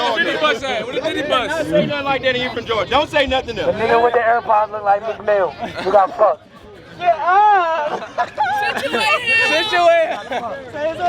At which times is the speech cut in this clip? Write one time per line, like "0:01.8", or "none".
none